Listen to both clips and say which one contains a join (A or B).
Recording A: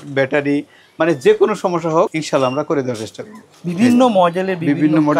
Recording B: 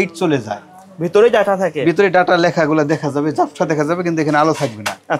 A